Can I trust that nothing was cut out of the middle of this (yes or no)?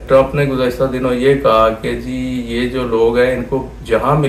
yes